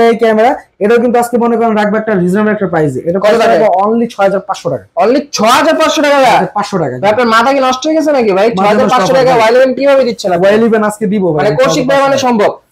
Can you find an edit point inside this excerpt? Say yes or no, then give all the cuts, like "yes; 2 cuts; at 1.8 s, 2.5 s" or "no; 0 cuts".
no; 0 cuts